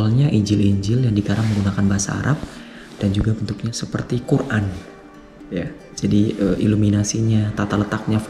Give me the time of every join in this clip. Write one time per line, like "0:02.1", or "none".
0:04.2